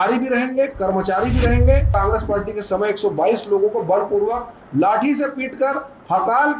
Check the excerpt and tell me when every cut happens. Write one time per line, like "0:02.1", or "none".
0:01.9